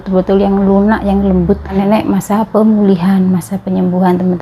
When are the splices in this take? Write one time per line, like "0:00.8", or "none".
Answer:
0:01.7